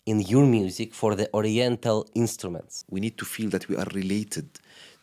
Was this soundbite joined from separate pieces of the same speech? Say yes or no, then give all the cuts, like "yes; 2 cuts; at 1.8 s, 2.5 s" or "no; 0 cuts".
yes; 1 cut; at 2.8 s